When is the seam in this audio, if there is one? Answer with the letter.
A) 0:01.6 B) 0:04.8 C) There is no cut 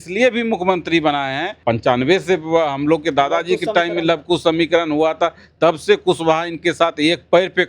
A